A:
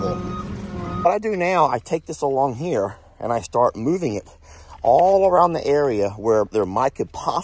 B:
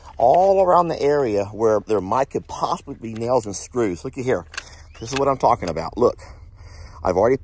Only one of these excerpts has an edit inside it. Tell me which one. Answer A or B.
A